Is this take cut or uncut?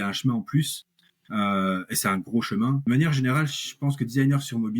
cut